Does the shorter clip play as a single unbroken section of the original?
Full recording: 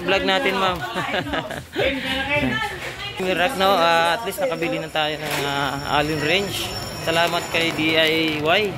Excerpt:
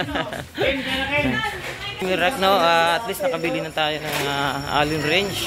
yes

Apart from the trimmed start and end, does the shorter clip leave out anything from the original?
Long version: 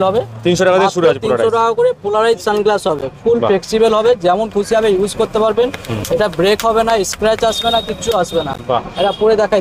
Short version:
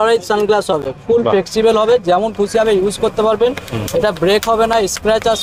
no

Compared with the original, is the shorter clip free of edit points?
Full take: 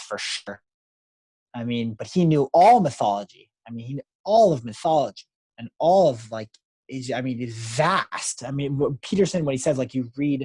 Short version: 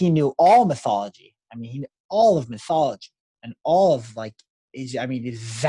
yes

